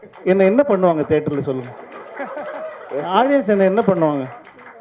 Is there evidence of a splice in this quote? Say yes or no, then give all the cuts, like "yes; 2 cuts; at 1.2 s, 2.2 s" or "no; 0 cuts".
no; 0 cuts